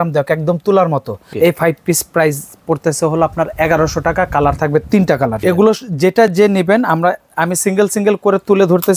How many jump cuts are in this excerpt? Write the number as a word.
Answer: two